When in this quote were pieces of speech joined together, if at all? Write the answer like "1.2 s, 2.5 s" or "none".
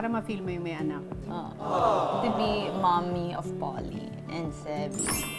none